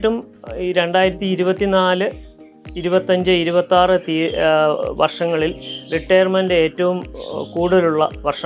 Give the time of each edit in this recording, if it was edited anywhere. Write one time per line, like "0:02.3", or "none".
none